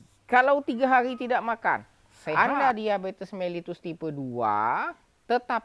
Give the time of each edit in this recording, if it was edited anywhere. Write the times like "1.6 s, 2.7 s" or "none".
2.3 s